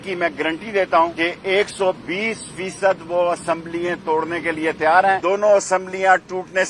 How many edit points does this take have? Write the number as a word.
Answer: two